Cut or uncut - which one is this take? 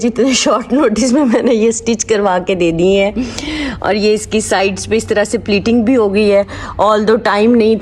uncut